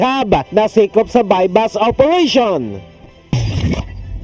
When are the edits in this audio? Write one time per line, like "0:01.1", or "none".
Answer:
0:02.8